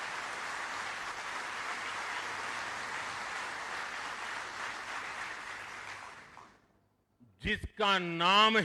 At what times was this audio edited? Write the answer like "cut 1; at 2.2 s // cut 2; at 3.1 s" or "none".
none